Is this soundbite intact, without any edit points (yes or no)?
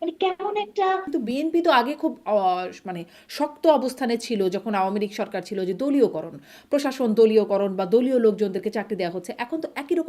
no